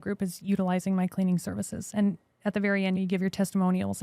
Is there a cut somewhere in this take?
no; 0 cuts

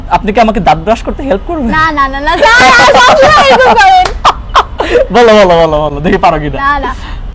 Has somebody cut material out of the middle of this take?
no; 0 cuts

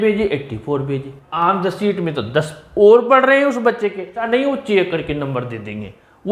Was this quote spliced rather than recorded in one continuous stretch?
yes; 2 cuts; at 1.3 s, 4.3 s

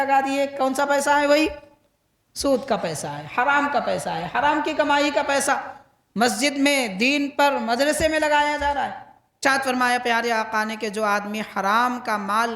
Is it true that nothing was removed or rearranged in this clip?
no; 1 cut; at 9.4 s

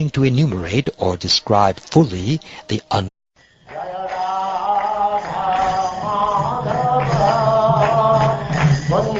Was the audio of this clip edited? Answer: no; 0 cuts

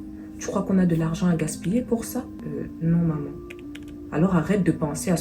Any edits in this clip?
yes; 1 cut; at 2.4 s

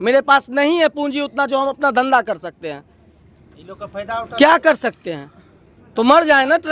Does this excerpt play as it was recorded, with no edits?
yes; 0 cuts

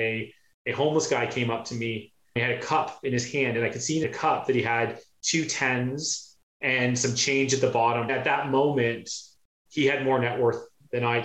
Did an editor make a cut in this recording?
yes; 2 cuts; at 4.0 s, 8.1 s

